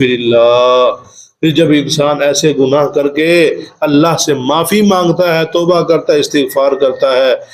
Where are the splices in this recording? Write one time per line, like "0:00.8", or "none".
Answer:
none